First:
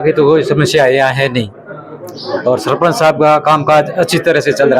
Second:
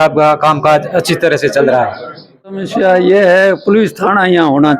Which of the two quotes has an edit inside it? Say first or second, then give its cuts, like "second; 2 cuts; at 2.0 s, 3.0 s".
second; 1 cut; at 2.7 s